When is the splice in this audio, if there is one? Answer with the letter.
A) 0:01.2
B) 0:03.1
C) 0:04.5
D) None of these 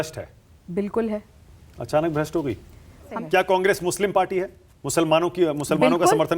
B